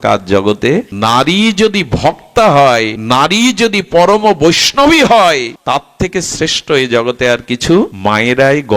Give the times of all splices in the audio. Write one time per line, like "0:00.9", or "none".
0:00.9
0:02.9
0:05.5
0:07.9